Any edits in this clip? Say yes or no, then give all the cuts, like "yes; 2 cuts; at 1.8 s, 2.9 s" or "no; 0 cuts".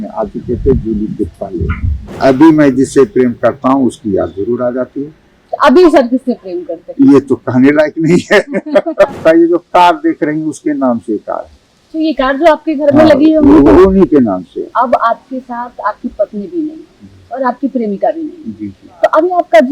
yes; 3 cuts; at 2.2 s, 9.2 s, 14.7 s